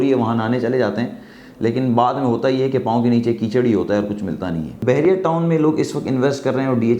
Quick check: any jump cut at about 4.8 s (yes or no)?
yes